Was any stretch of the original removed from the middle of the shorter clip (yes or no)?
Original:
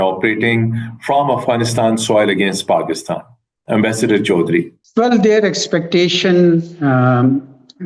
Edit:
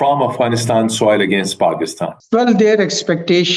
yes